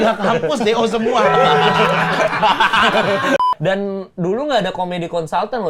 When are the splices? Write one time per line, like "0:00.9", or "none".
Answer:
0:03.4